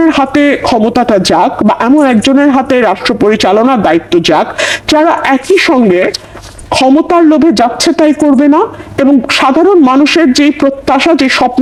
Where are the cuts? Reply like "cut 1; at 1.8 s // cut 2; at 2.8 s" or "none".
none